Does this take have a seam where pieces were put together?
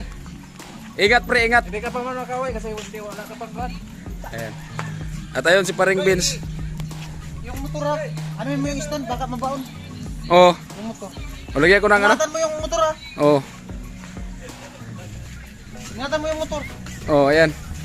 no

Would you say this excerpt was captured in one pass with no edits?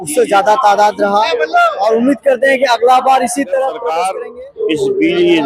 no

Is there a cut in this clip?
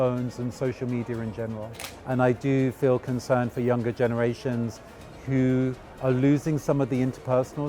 yes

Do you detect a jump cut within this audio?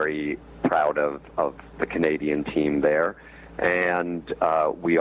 no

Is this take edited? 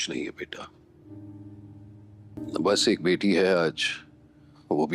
yes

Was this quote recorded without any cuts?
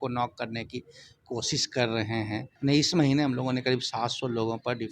no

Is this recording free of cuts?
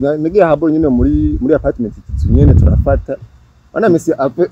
yes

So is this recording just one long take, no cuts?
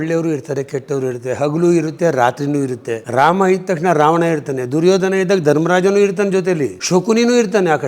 no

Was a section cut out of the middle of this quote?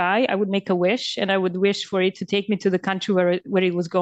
no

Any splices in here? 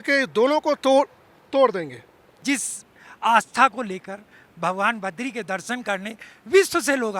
yes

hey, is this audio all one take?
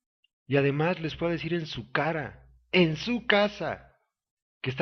no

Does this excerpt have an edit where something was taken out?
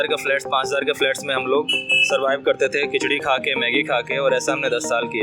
no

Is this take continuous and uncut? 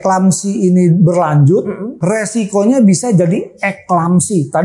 no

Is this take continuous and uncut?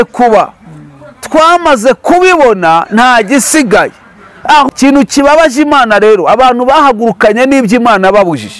no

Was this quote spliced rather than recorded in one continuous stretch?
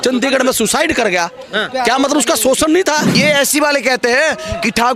yes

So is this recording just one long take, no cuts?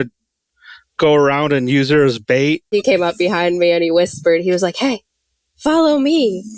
no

